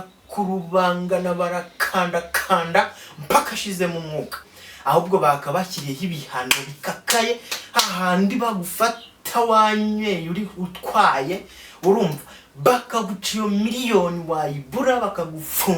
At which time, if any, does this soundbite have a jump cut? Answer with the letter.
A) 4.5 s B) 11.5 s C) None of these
A